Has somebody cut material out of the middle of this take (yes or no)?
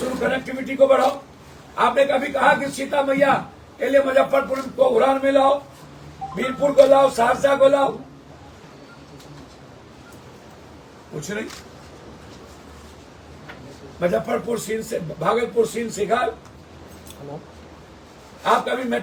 no